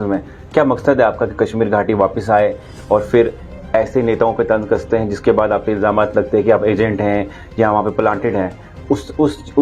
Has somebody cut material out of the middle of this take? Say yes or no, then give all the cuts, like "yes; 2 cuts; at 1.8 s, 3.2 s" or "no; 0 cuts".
no; 0 cuts